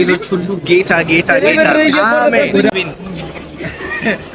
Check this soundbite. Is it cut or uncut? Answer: cut